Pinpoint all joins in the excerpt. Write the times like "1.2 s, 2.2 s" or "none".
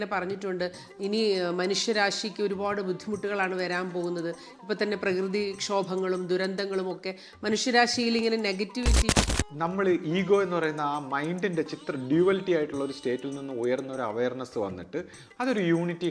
9.1 s